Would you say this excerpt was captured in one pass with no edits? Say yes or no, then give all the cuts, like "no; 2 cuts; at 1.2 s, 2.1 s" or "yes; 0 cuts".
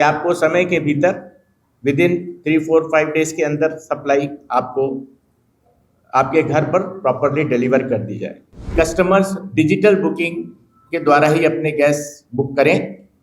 no; 1 cut; at 8.7 s